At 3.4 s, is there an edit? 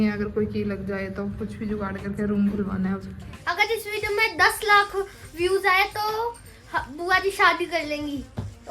yes; 1 cut; at 3.4 s

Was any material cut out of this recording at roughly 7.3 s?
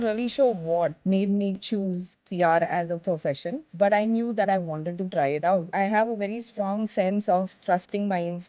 no; 2 cuts; at 1.0 s, 5.7 s

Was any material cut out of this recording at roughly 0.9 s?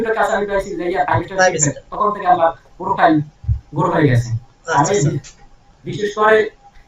no; 0 cuts

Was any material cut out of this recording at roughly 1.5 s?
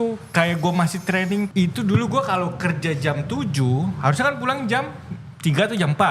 yes; 1 cut; at 1.5 s

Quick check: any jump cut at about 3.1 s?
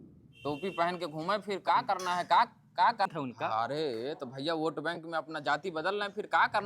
yes; 1 cut; at 3.1 s

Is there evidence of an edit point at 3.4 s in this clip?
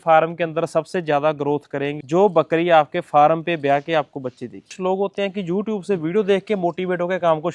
no; 2 cuts; at 2.0 s, 4.7 s

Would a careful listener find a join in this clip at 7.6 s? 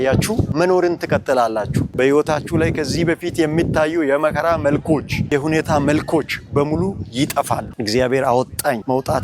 yes; 1 cut; at 7.6 s

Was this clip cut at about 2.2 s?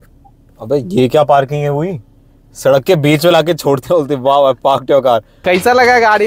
no; 1 cut; at 5.3 s

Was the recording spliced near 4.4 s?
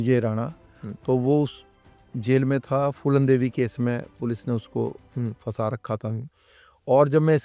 no; 0 cuts

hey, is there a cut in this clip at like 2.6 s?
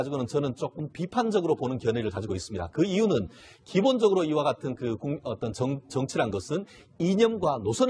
yes; 1 cut; at 2.6 s

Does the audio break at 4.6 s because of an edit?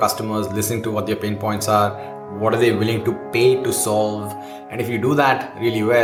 no; 0 cuts

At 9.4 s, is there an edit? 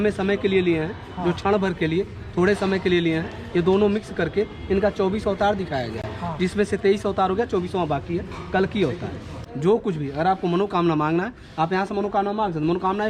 yes; 1 cut; at 9.4 s

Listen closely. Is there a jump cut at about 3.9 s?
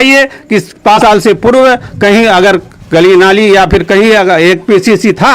no; 1 cut; at 1.0 s

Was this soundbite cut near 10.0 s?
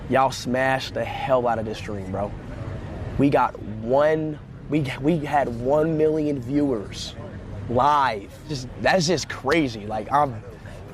no; 1 cut; at 8.6 s

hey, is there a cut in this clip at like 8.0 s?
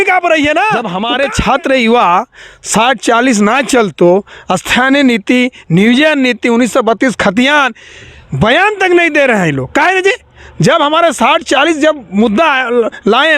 no; 1 cut; at 0.9 s

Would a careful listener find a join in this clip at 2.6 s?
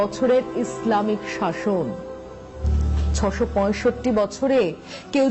yes; 1 cut; at 2.6 s

